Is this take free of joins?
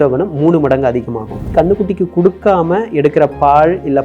no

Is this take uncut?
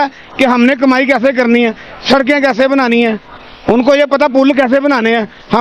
yes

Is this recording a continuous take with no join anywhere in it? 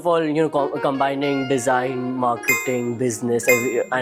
yes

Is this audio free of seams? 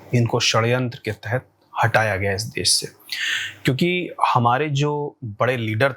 yes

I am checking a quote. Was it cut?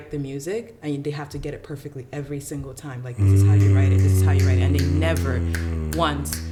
no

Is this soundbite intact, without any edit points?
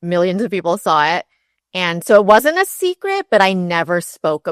yes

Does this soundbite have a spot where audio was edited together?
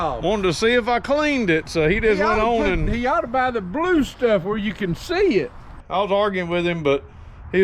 yes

